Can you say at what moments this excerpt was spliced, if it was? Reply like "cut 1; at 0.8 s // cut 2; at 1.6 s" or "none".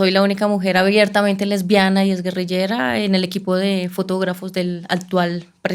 none